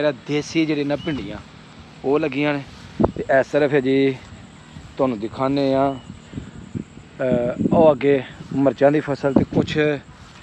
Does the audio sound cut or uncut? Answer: uncut